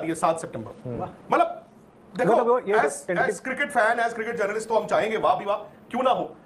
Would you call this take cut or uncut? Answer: uncut